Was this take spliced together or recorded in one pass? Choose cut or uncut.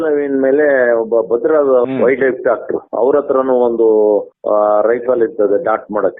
uncut